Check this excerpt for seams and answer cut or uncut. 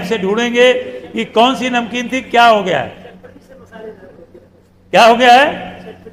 uncut